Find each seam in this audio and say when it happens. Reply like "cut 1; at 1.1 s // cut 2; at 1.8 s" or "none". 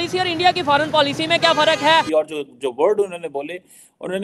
cut 1; at 2.0 s

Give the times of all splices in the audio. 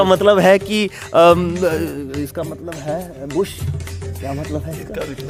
none

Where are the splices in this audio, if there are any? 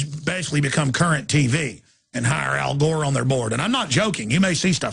none

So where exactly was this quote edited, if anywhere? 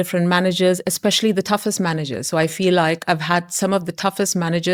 none

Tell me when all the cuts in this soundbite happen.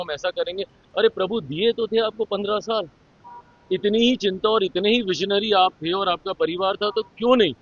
none

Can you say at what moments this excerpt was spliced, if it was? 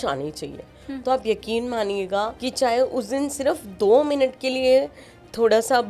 cut 1; at 2.4 s

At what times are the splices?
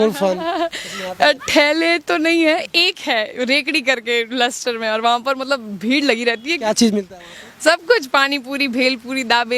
none

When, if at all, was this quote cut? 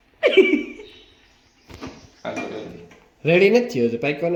none

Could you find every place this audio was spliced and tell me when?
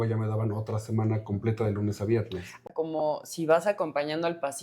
cut 1; at 2.6 s

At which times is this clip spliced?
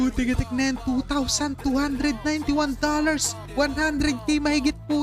none

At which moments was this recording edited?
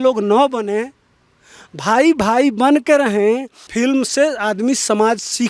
cut 1; at 3.6 s

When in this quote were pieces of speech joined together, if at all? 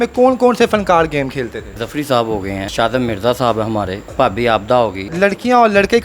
cut 1; at 1.8 s // cut 2; at 2.7 s // cut 3; at 4.1 s // cut 4; at 5.0 s

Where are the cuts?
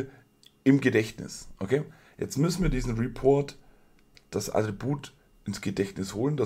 none

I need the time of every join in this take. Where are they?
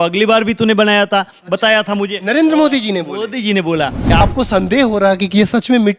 cut 1; at 4.2 s

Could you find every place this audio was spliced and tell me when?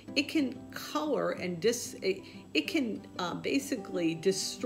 none

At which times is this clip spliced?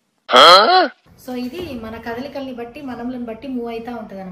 cut 1; at 1.1 s

